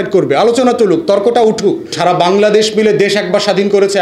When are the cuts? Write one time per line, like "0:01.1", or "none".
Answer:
0:02.0

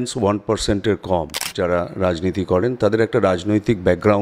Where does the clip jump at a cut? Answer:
0:01.5

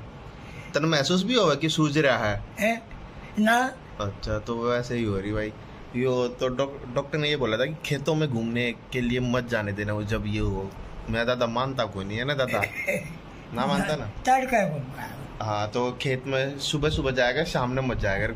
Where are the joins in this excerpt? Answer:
none

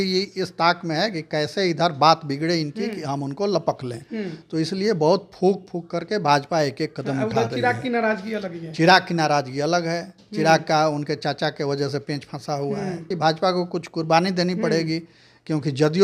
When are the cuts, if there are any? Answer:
0:13.1

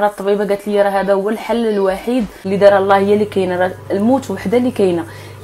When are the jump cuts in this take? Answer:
0:02.4

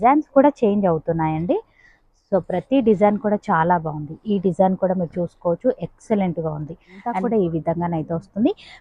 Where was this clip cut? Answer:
0:07.1

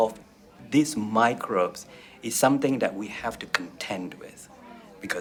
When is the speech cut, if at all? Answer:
none

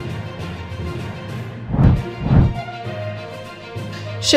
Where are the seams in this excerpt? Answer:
0:01.5

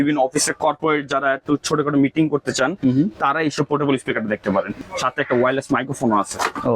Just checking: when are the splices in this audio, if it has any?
0:04.7

